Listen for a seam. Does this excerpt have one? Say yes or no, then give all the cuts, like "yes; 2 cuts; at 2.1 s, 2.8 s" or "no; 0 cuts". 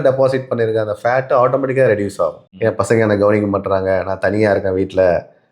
yes; 1 cut; at 2.5 s